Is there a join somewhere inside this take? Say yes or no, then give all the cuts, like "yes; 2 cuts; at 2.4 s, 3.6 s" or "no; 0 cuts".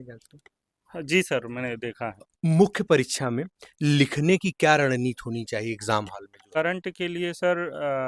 yes; 2 cuts; at 2.2 s, 6.6 s